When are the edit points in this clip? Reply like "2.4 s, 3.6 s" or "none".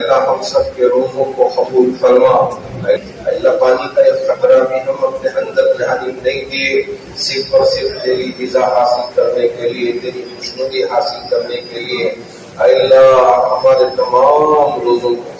none

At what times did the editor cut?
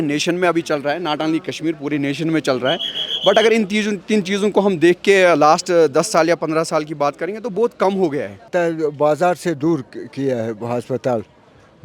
8.5 s

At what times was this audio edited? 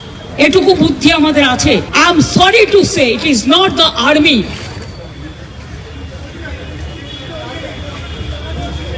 1.9 s

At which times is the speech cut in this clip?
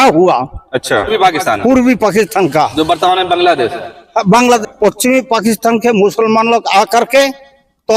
1.1 s, 4.6 s

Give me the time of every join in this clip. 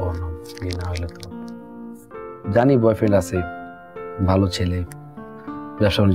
2.1 s

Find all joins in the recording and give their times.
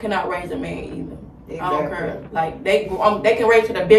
none

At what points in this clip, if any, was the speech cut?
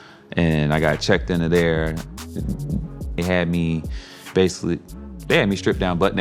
3.2 s

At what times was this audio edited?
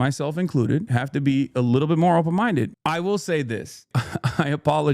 2.7 s, 3.9 s

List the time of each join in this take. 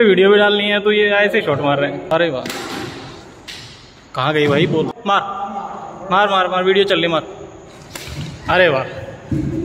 none

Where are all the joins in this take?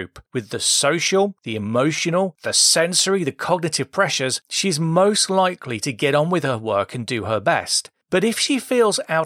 none

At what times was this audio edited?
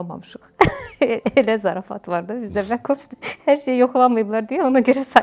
none

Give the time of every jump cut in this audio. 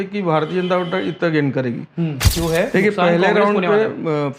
2.3 s

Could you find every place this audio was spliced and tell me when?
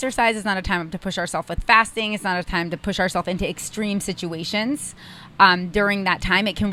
none

